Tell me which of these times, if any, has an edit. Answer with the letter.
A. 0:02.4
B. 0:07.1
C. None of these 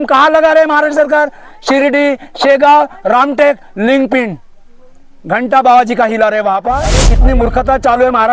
B